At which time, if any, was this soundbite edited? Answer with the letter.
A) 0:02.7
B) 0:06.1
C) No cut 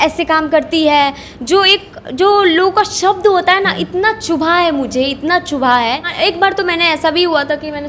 B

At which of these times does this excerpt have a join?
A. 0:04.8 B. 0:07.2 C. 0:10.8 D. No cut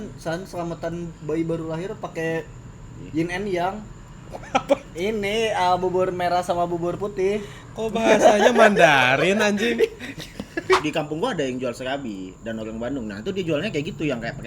C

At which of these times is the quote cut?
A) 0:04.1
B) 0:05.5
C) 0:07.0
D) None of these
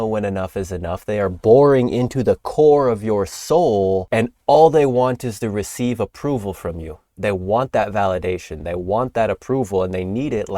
A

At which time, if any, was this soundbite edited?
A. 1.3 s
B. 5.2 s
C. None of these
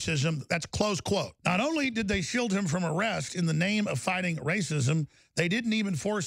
A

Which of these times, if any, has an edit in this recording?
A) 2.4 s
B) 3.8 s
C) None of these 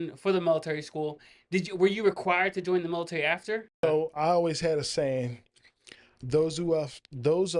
B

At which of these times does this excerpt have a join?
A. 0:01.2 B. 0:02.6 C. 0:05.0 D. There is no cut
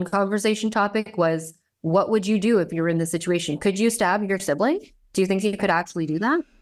D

